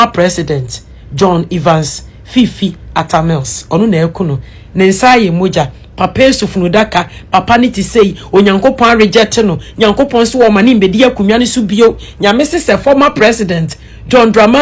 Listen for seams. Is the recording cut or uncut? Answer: uncut